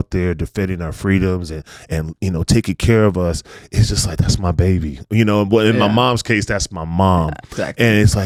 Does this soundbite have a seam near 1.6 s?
no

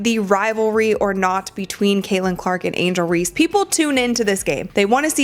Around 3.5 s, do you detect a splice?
no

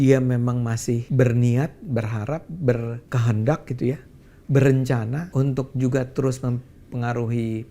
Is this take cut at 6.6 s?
no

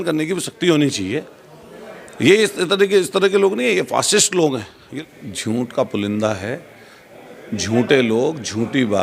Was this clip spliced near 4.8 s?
yes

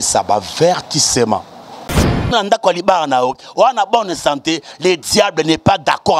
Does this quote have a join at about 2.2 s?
yes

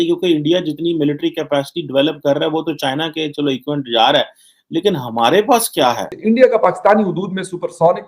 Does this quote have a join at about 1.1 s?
no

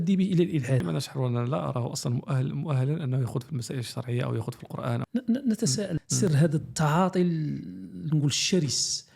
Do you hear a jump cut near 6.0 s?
yes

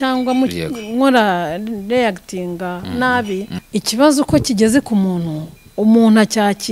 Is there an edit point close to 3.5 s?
yes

